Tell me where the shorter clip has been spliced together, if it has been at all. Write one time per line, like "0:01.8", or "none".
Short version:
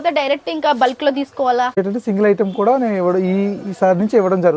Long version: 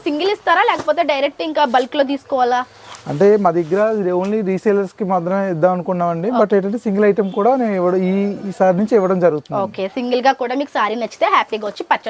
0:01.8